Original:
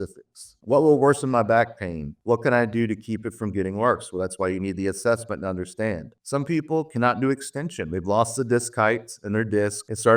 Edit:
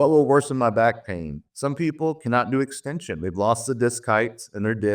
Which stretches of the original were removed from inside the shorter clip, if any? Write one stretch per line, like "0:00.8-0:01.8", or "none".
0:02.1-0:06.1